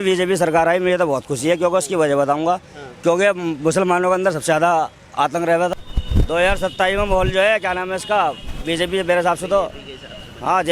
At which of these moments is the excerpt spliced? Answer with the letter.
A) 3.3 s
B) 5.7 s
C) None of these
B